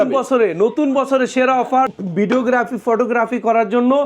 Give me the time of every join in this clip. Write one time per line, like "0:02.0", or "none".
0:02.0